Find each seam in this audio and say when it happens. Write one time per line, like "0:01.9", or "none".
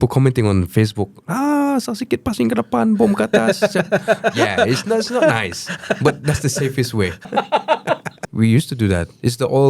0:04.3
0:07.3
0:08.2